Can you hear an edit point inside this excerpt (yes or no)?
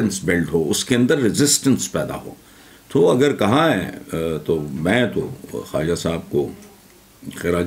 no